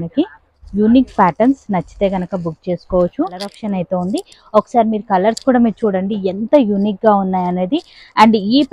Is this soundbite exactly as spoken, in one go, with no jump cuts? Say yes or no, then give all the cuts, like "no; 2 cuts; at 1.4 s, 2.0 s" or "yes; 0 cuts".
no; 1 cut; at 3.6 s